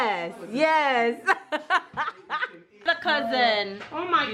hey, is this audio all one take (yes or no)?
no